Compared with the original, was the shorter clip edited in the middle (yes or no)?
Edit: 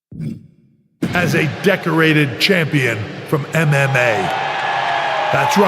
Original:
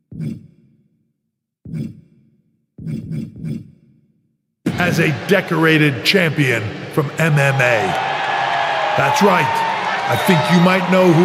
yes